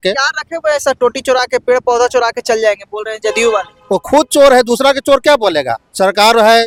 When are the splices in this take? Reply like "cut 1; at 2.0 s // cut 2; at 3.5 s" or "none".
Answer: none